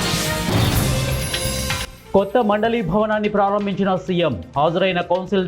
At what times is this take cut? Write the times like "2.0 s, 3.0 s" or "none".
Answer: 1.9 s